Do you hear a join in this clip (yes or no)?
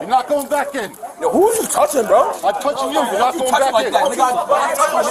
no